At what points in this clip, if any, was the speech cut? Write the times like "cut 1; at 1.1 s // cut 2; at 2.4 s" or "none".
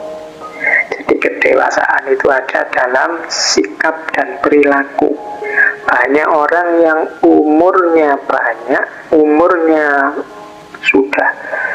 none